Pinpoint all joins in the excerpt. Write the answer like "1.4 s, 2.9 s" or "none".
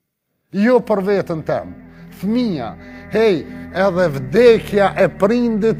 none